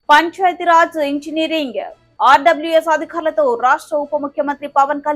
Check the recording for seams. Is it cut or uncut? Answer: uncut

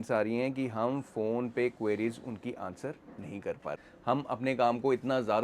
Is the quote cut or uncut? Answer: cut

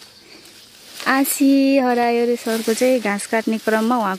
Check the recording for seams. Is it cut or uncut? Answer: uncut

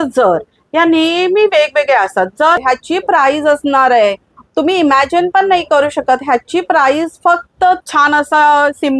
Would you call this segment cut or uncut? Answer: cut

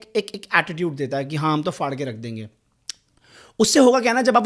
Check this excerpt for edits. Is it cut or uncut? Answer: uncut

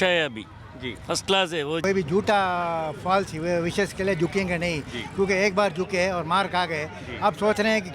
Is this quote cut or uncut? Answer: cut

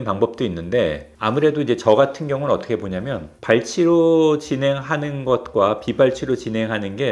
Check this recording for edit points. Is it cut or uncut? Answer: uncut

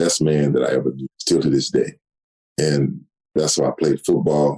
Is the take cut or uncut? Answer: cut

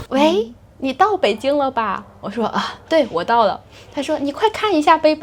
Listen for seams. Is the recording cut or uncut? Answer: uncut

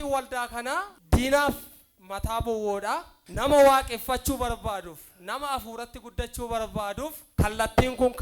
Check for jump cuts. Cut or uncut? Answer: cut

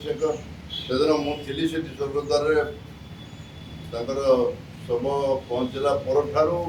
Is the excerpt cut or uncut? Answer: uncut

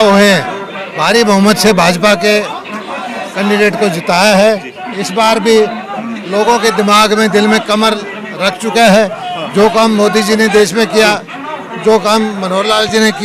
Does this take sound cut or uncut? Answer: uncut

